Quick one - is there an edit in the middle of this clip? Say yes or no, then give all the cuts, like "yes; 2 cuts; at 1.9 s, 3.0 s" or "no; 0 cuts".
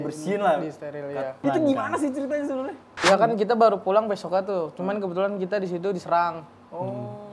yes; 2 cuts; at 1.4 s, 2.9 s